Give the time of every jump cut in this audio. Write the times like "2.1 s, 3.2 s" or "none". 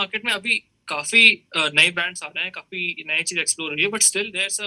none